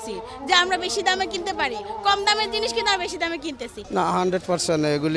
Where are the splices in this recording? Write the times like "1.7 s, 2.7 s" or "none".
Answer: 3.7 s